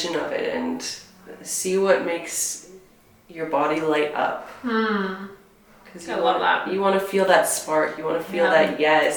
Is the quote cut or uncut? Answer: uncut